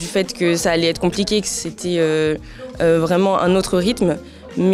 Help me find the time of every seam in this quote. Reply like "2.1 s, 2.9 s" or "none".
none

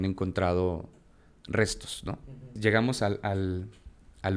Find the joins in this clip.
2.6 s

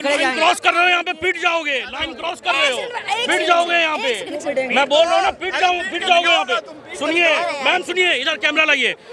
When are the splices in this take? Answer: none

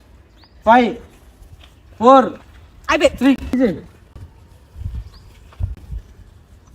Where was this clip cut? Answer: 3.5 s

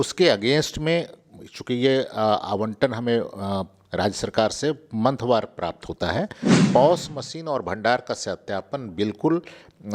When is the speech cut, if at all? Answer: 6.6 s

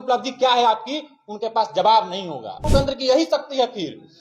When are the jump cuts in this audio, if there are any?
2.7 s

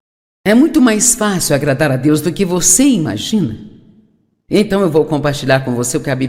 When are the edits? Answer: 3.2 s

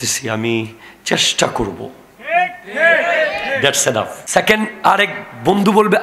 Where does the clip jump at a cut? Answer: 4.2 s

